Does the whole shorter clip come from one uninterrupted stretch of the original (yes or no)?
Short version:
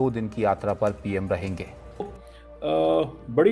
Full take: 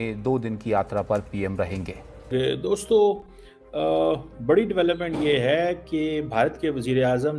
no